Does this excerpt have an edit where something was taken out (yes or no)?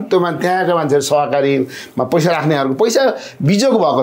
no